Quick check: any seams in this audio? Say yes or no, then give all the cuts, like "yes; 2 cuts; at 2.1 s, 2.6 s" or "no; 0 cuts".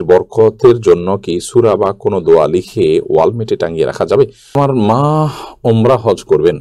yes; 1 cut; at 4.4 s